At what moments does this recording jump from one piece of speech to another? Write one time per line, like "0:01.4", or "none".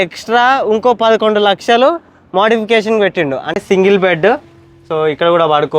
0:03.6

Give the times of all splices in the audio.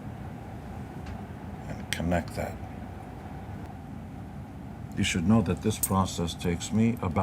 0:03.7

